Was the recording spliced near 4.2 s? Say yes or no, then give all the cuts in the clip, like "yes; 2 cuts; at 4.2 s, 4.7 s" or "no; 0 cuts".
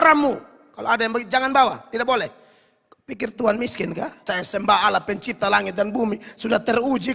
yes; 1 cut; at 4.2 s